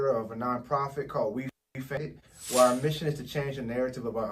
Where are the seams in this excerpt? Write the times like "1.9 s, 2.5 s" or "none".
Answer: 2.0 s